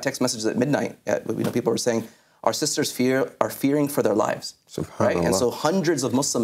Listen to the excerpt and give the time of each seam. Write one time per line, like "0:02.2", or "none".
none